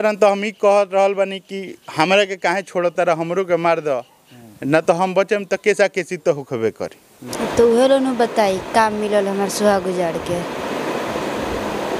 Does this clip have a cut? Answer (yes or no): yes